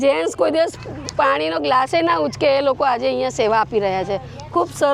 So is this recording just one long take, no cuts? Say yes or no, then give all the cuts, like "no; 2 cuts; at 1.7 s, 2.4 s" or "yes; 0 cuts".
yes; 0 cuts